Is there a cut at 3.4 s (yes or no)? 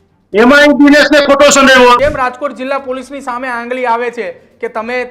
no